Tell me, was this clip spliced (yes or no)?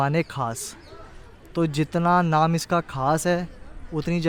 no